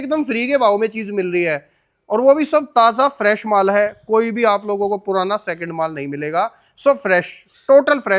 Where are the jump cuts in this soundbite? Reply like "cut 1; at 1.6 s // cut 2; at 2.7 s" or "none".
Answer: none